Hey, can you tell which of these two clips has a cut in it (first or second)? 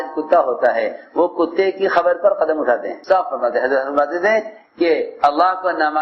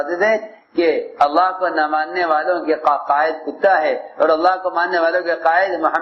first